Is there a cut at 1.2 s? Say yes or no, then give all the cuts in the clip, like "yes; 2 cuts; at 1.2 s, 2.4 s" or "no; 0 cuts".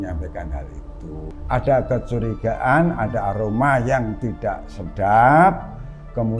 yes; 1 cut; at 1.2 s